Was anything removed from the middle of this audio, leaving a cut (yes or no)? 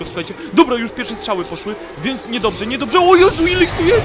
no